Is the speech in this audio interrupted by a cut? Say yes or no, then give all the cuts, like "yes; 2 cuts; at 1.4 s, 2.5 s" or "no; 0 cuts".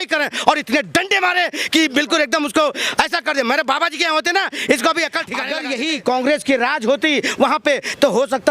yes; 1 cut; at 5.6 s